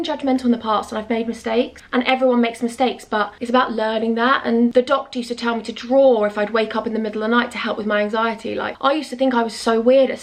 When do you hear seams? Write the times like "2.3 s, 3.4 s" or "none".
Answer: none